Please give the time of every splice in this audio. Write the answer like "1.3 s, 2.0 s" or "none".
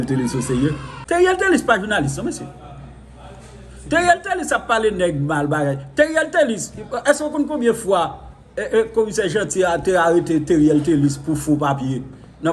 0.9 s